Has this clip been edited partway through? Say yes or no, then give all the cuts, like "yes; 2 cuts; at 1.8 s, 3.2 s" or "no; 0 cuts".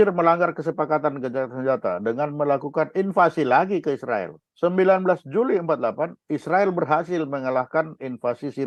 no; 0 cuts